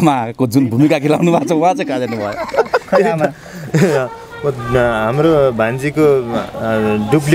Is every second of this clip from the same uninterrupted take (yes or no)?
yes